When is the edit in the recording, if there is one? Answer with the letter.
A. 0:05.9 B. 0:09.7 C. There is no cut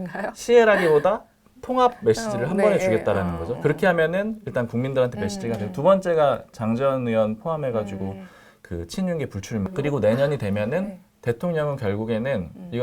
B